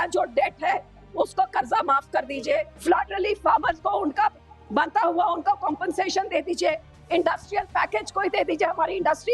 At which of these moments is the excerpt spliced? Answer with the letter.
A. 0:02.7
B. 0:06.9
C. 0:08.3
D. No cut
A